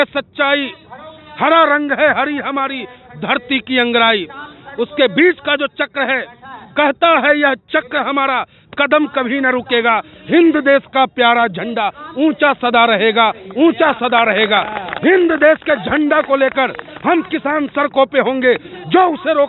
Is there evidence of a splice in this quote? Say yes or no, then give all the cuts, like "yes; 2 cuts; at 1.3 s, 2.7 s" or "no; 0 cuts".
no; 0 cuts